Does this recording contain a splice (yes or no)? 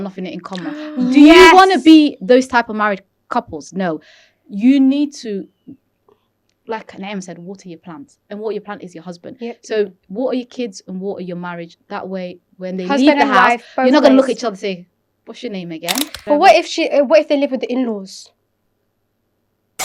yes